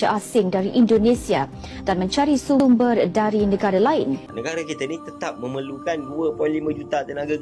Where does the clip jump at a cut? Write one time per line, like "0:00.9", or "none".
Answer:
0:04.3

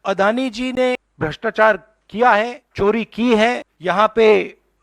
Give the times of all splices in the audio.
0:01.1
0:02.6
0:03.7

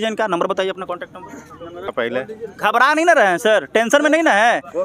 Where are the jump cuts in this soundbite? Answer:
0:01.9

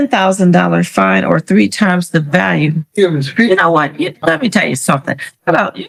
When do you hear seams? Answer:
none

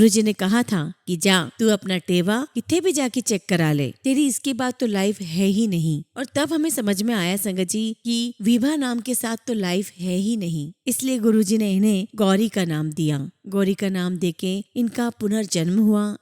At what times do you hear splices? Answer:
none

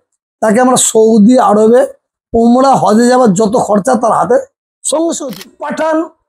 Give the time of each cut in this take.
0:05.3

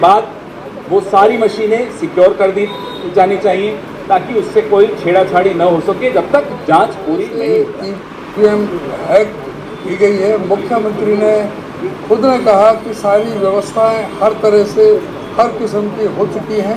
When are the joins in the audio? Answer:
0:07.3

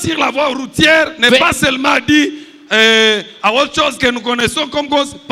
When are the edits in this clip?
none

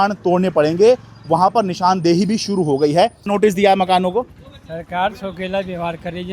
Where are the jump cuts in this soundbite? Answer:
0:03.3

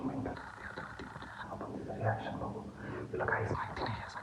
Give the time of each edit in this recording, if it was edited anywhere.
none

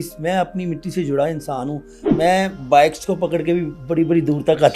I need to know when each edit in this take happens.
0:02.0

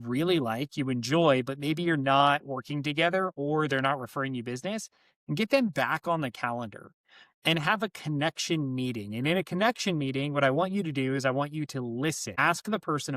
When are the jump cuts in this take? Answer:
0:12.3

